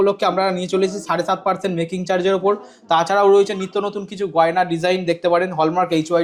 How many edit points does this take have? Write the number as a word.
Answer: zero